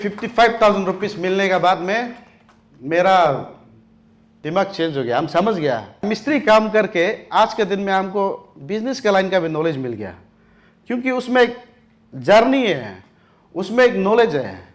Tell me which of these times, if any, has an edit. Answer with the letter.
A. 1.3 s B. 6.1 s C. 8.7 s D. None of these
B